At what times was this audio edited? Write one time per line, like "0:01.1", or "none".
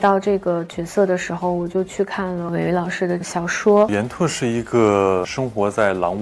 0:02.5
0:03.2
0:03.9